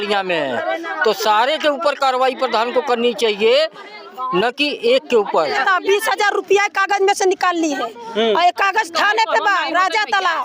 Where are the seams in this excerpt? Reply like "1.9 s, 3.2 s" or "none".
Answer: 5.5 s